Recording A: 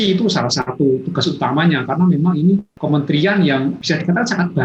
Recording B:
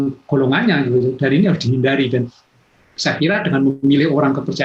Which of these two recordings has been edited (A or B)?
A